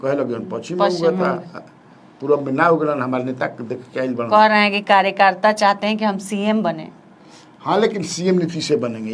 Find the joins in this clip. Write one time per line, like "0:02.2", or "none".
none